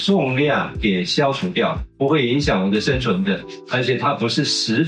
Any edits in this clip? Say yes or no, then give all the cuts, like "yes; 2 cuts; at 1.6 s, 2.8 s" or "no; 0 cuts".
yes; 1 cut; at 1.8 s